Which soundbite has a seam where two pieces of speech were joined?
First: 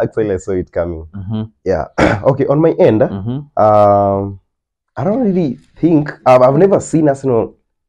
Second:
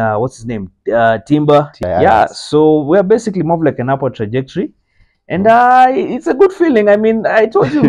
second; 1 cut; at 1.8 s

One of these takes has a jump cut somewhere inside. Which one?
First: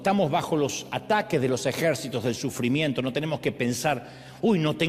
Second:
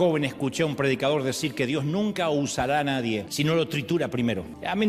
second; 1 cut; at 3.3 s

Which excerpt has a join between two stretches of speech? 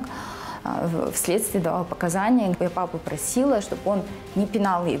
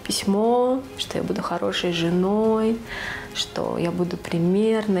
first; 1 cut; at 2.6 s

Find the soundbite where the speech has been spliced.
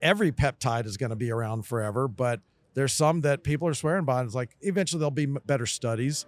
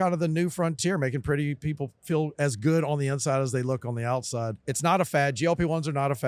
second; 1 cut; at 4.6 s

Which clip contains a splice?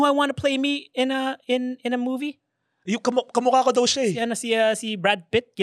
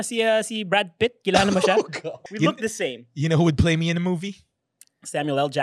second; 1 cut; at 2.2 s

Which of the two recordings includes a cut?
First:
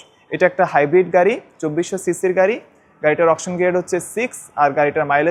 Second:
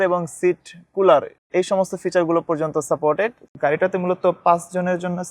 second; 1 cut; at 3.4 s

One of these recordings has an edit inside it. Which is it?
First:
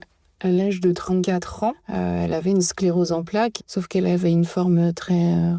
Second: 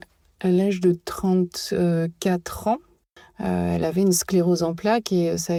first; 2 cuts; at 1.2 s, 3.5 s

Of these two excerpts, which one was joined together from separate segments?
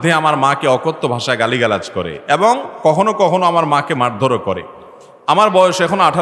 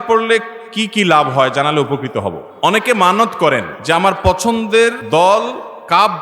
second; 3 cuts; at 2.4 s, 3.7 s, 5.0 s

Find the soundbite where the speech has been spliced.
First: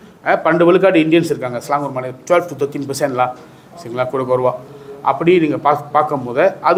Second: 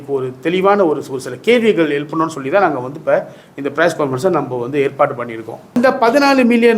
second; 1 cut; at 5.7 s

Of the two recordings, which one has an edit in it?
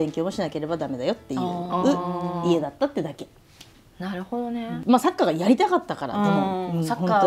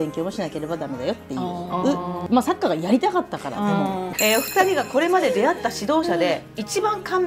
second; 2 cuts; at 2.2 s, 4.1 s

